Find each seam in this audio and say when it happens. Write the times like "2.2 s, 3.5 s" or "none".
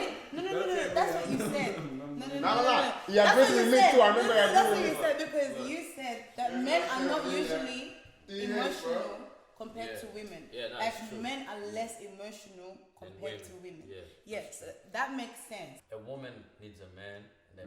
6.2 s, 15.8 s

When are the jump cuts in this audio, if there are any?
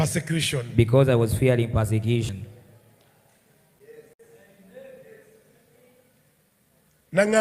none

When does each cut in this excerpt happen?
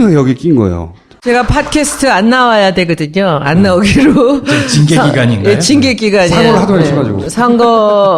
5.8 s

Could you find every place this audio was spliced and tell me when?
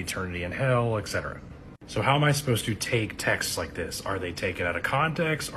1.5 s

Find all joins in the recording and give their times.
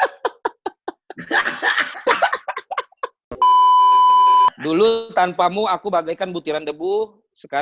3.3 s, 4.6 s

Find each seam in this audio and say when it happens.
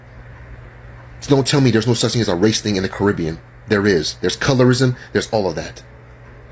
none

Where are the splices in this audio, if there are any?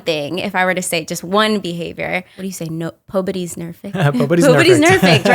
2.4 s

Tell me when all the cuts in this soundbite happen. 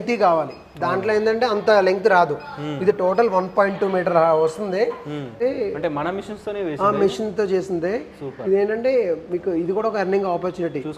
5.3 s

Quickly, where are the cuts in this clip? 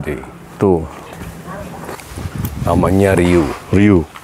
1.9 s

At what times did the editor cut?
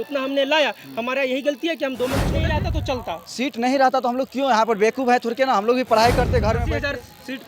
2.5 s, 6.6 s

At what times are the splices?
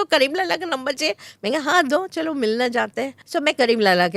3.1 s

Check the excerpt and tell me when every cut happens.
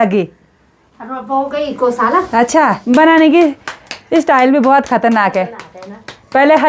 2.8 s

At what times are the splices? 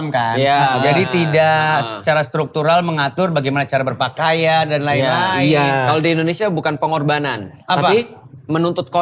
none

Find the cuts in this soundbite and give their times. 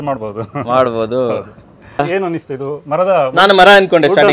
2.0 s

